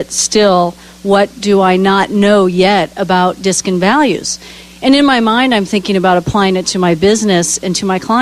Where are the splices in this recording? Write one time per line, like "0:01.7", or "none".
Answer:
0:06.0